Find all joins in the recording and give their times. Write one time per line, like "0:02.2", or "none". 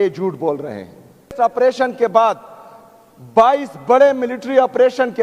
0:01.3